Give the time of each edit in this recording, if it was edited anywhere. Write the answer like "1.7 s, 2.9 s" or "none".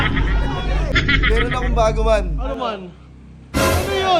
1.0 s